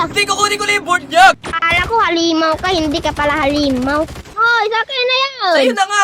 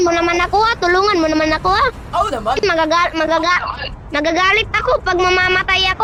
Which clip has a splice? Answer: first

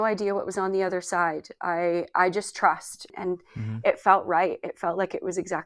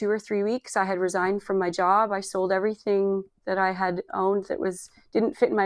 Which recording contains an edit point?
first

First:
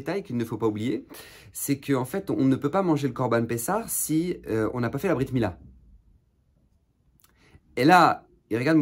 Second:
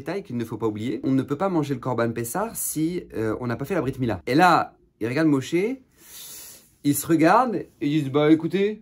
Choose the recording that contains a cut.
second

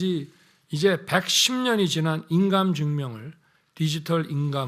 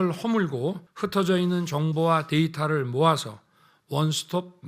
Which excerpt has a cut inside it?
second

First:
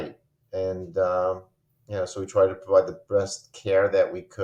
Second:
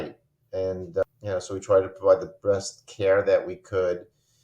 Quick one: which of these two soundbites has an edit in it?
second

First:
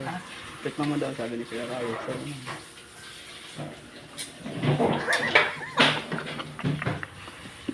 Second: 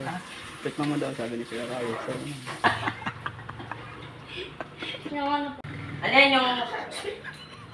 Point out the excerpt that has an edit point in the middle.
second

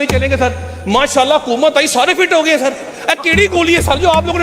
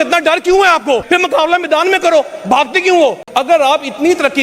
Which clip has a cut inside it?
second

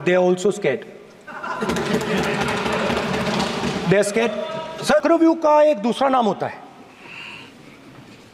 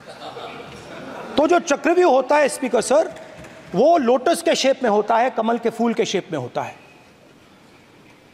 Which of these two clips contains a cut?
first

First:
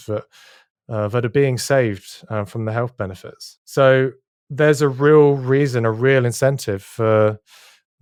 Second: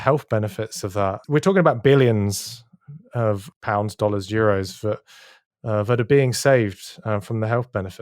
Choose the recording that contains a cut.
second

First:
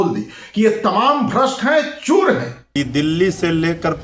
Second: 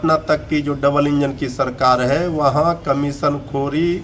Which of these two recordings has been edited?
first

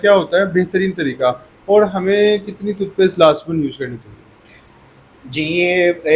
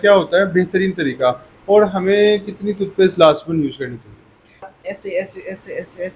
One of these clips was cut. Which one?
second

